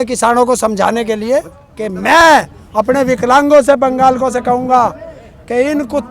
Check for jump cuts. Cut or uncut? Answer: cut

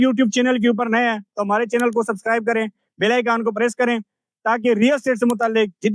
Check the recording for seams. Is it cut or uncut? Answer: uncut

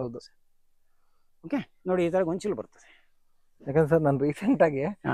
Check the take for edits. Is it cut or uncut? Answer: uncut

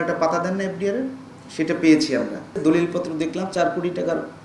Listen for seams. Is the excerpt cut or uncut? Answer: cut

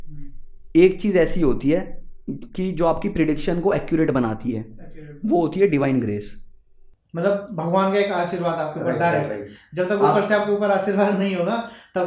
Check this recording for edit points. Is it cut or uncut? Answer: uncut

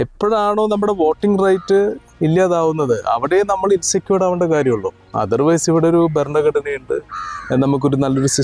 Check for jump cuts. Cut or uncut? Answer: uncut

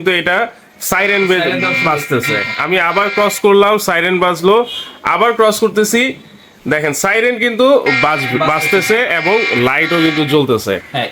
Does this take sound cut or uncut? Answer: uncut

